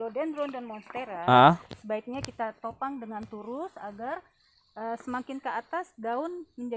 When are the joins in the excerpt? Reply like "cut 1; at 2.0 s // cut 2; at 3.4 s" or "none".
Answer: none